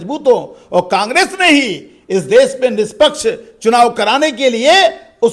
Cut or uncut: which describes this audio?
uncut